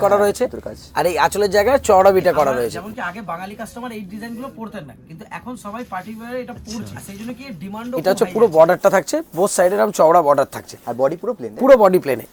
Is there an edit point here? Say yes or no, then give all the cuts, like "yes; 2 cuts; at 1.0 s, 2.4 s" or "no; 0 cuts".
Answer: yes; 3 cuts; at 2.8 s, 7.0 s, 8.0 s